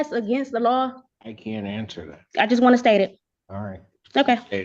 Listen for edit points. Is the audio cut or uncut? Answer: cut